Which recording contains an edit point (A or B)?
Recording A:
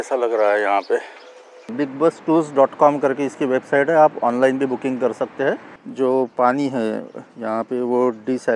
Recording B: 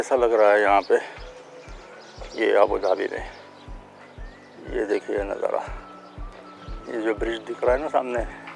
A